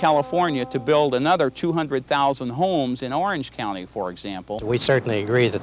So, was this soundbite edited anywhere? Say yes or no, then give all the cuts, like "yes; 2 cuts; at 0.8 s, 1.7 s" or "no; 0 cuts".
yes; 1 cut; at 4.5 s